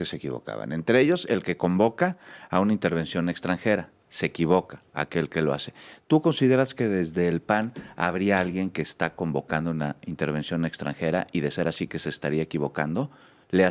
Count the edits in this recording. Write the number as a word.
zero